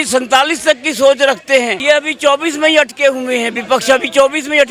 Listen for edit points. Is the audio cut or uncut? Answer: cut